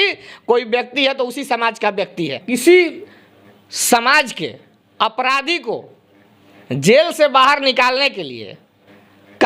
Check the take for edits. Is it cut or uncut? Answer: cut